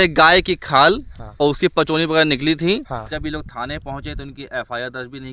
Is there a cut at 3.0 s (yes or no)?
yes